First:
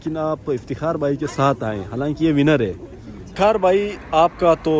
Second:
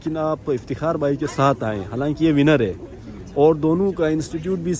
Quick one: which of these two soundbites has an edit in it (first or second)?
first